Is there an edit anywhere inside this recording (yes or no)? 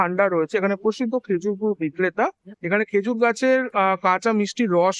no